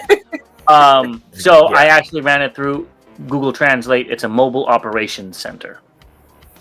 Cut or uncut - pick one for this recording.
cut